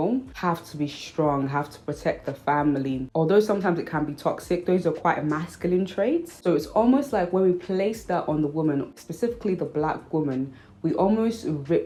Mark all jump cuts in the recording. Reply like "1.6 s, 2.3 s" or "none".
none